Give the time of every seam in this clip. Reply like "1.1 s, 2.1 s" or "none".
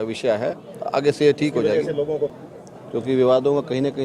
2.5 s